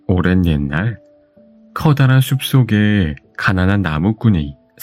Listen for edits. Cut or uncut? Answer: uncut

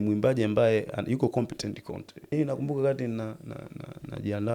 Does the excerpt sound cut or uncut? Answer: cut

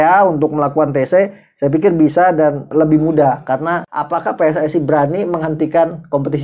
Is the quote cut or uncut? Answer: cut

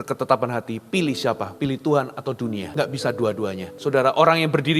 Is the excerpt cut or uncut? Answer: cut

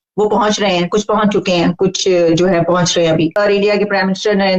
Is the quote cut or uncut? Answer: cut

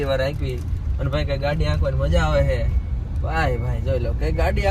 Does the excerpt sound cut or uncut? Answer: uncut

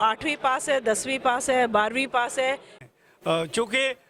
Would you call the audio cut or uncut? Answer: cut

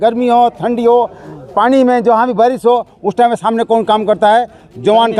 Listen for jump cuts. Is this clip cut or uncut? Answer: uncut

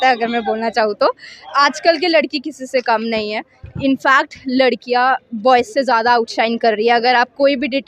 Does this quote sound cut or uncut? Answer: uncut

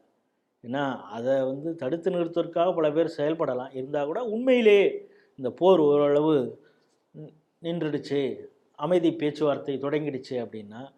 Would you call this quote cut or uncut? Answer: uncut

